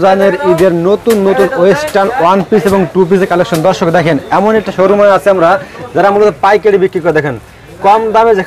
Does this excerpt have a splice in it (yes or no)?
no